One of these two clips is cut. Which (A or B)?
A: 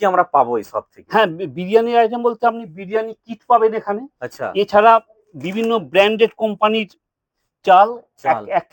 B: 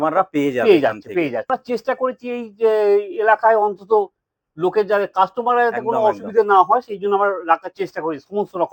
B